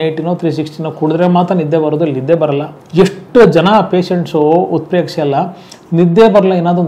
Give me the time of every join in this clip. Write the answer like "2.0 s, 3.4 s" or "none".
2.8 s